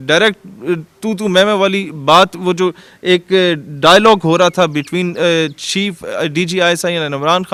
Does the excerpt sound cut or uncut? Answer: uncut